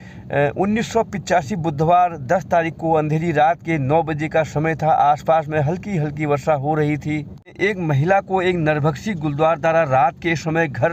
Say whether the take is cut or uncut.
cut